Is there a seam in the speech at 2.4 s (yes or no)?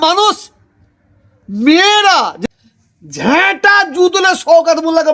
yes